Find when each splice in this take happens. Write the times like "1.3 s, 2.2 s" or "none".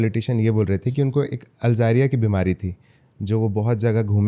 none